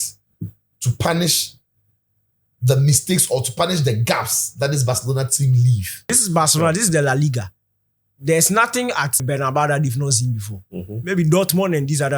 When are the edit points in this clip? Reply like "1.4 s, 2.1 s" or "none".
6.2 s, 9.2 s